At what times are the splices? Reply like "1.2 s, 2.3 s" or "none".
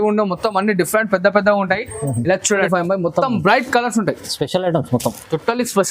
2.7 s